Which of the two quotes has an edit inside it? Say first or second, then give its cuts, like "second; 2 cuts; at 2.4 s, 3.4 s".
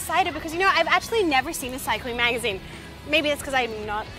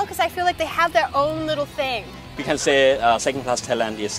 second; 1 cut; at 2.3 s